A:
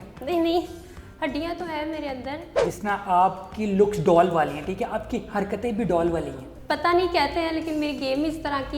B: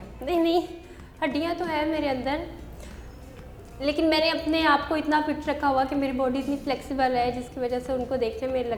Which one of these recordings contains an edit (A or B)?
A